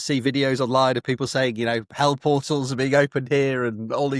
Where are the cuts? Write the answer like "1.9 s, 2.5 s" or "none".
none